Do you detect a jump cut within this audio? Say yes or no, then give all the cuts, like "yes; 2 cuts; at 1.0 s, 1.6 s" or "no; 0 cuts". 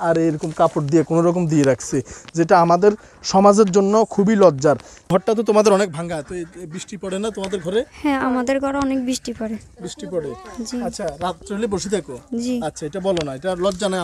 yes; 1 cut; at 5.1 s